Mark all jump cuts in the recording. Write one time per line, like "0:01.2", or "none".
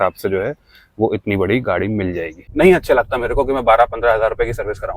0:02.3